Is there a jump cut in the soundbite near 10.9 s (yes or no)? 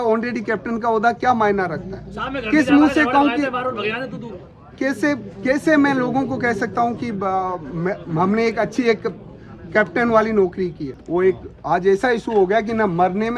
yes